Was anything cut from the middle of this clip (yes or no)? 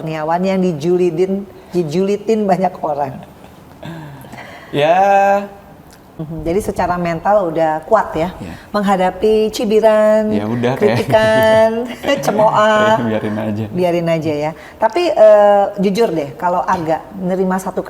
yes